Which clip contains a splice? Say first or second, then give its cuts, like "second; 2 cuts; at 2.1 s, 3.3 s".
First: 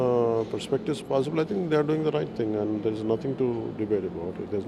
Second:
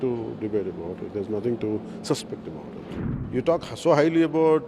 second; 1 cut; at 2.9 s